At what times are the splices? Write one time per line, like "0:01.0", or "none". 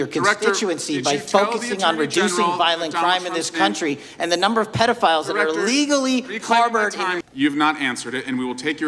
0:07.2